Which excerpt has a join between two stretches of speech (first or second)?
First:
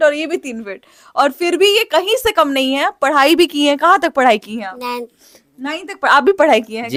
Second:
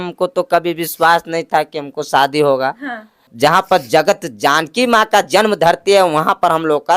second